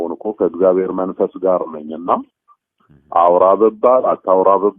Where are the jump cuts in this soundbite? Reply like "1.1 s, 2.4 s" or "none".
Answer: none